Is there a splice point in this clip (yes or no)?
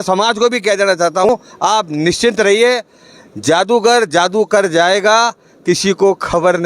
yes